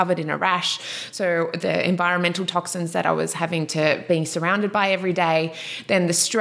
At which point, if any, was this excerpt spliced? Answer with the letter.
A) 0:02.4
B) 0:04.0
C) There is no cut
B